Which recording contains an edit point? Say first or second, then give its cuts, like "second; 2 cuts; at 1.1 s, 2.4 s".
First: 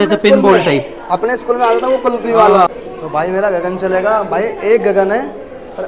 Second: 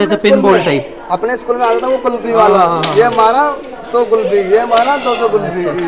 first; 1 cut; at 2.7 s